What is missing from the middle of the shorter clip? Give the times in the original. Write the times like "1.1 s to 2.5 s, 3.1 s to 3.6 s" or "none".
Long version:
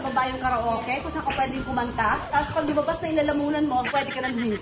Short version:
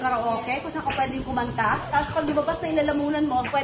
none